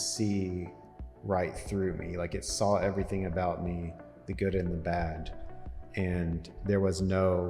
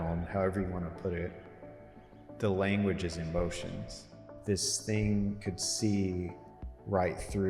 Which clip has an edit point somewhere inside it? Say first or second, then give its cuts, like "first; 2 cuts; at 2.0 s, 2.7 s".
second; 1 cut; at 4.3 s